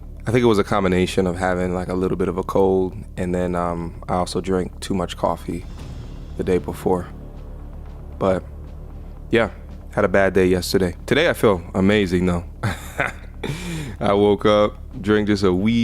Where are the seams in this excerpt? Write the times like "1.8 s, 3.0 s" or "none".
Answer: 5.6 s, 12.7 s